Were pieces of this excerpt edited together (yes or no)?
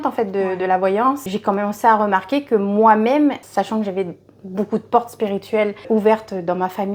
no